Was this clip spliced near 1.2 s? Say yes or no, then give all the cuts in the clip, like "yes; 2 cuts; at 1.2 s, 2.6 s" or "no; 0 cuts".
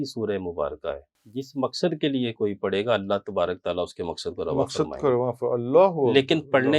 yes; 1 cut; at 1.2 s